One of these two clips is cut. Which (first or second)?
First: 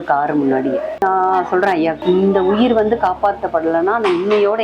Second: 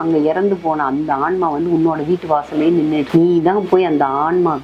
first